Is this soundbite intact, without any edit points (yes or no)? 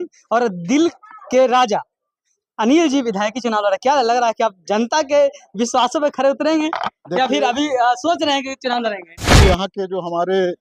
no